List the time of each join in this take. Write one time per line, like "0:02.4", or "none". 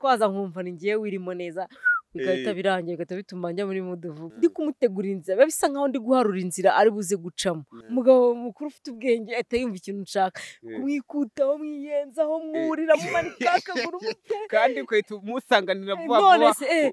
0:04.2
0:07.7